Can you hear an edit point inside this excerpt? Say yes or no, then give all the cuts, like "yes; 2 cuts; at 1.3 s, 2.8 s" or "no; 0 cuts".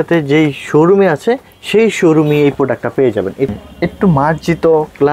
yes; 1 cut; at 3.5 s